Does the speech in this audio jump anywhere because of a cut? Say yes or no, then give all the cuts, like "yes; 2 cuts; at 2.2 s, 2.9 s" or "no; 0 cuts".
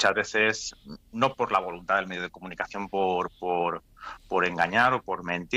no; 0 cuts